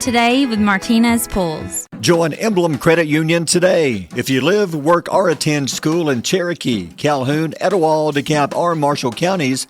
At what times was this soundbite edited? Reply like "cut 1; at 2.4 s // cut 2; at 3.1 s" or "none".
cut 1; at 2.0 s